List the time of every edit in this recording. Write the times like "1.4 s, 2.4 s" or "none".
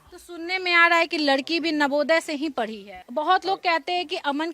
2.9 s